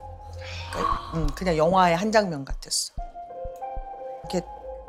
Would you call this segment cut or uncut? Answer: cut